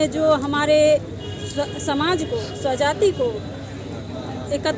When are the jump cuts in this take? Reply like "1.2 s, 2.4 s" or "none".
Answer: none